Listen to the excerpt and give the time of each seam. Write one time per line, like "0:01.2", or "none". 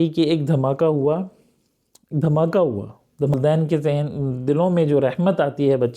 0:03.4